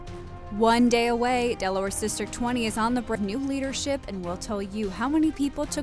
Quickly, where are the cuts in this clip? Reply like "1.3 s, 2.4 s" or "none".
3.2 s